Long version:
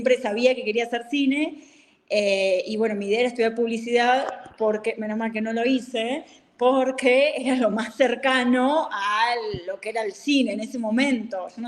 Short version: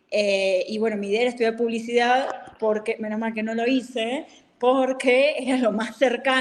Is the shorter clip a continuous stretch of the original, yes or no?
yes